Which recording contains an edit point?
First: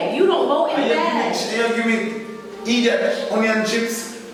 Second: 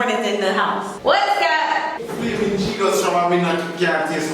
second; 2 cuts; at 0.9 s, 2.0 s

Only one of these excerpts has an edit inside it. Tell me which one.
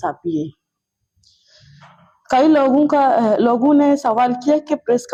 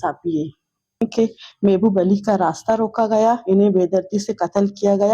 second; 1 cut; at 1.0 s

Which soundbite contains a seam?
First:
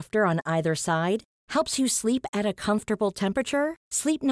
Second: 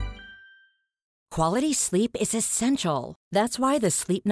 second; 1 cut; at 1.1 s

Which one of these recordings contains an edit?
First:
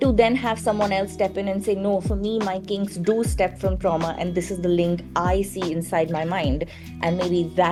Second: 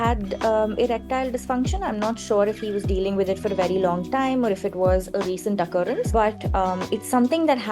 second; 1 cut; at 6.1 s

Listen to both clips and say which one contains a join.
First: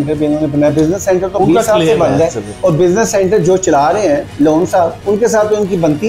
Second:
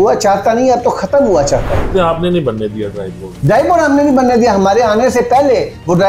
second; 1 cut; at 1.9 s

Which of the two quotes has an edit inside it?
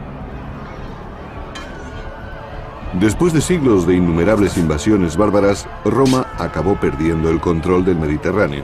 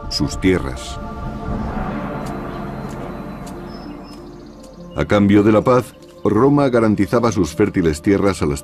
first; 1 cut; at 2.2 s

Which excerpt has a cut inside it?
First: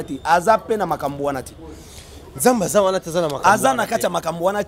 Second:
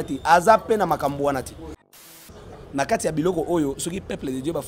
second; 1 cut; at 2.3 s

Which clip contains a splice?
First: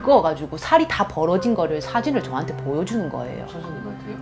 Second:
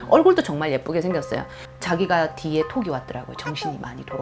second; 1 cut; at 1.7 s

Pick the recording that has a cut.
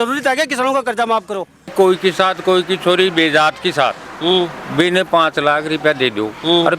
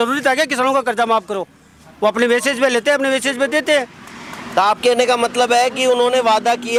first; 1 cut; at 1.6 s

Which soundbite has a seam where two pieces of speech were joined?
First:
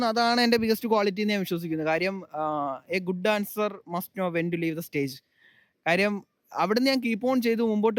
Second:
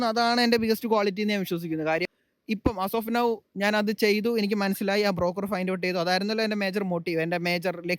second; 1 cut; at 2.2 s

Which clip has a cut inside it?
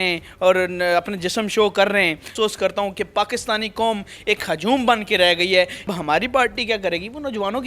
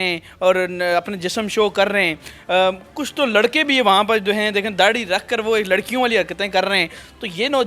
first; 2 cuts; at 2.3 s, 5.9 s

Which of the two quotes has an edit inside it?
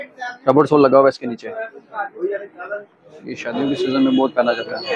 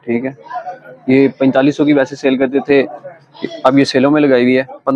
first; 1 cut; at 3.4 s

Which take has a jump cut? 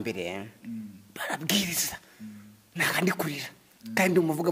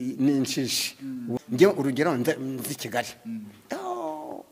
second; 1 cut; at 1.3 s

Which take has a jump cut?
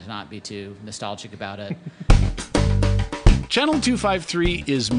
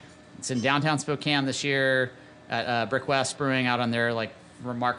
first; 1 cut; at 2.0 s

